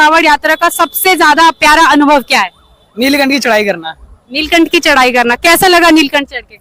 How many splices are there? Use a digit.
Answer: 0